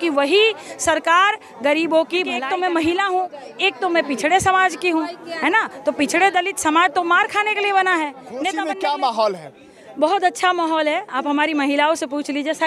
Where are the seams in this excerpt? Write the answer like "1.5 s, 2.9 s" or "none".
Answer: 2.4 s, 8.6 s